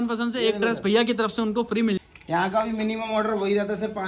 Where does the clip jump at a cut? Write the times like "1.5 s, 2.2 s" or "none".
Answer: 2.0 s